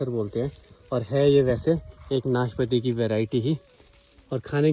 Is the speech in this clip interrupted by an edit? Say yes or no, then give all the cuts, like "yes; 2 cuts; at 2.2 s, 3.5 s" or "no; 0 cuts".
no; 0 cuts